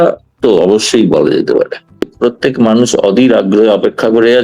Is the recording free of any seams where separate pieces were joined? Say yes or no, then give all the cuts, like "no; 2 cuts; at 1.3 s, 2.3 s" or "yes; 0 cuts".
no; 1 cut; at 2.1 s